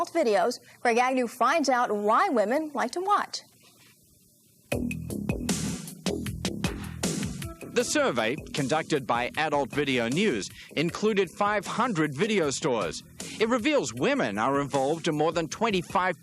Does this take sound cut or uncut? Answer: cut